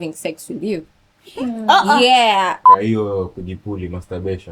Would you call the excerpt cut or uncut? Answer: cut